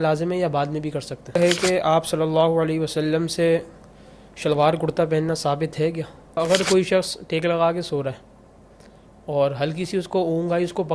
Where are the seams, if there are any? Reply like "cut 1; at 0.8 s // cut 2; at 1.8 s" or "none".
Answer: cut 1; at 1.4 s // cut 2; at 6.4 s